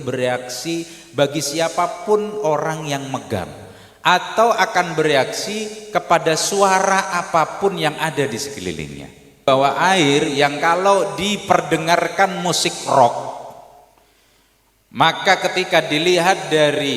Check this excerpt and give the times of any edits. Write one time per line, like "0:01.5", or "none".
0:09.4